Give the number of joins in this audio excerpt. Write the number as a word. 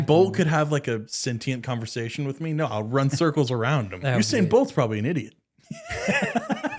two